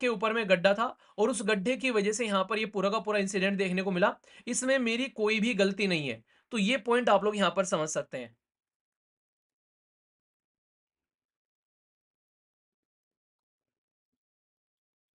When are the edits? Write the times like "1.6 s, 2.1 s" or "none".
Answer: none

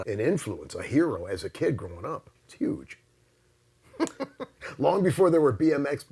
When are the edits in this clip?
1.2 s, 2.4 s

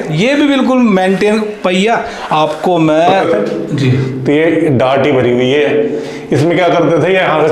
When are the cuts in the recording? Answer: 3.2 s

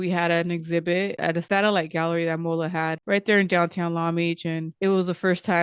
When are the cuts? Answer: none

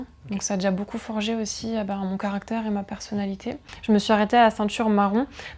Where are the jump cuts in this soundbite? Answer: 3.7 s

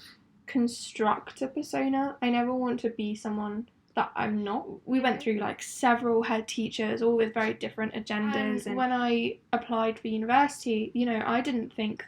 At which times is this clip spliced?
4.7 s, 8.6 s

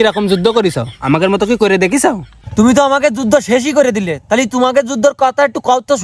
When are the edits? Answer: none

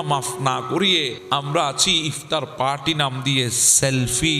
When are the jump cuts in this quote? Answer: 1.2 s

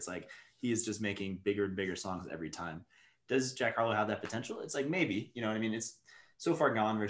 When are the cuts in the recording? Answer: none

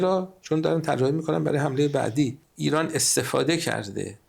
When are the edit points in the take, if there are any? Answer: 2.5 s

